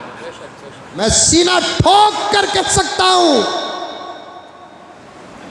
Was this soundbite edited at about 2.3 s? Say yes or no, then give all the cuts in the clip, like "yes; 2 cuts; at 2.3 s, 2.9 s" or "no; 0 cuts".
no; 1 cut; at 1.0 s